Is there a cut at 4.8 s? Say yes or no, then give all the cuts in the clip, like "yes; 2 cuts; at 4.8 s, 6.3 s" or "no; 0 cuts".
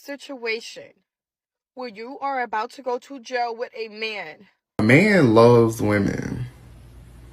yes; 1 cut; at 4.8 s